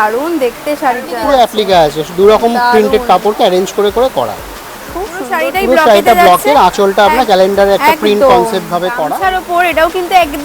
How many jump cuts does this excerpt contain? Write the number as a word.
three